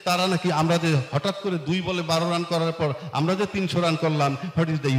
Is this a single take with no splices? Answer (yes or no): yes